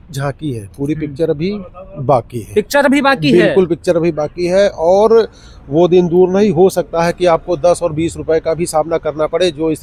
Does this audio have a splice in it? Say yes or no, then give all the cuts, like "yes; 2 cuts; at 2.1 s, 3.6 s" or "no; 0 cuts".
no; 0 cuts